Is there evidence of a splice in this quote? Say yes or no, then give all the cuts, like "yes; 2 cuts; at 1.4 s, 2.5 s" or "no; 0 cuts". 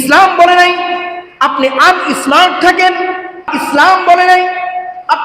yes; 1 cut; at 3.5 s